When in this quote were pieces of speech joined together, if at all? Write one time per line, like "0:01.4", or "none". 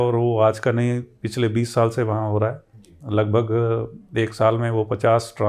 none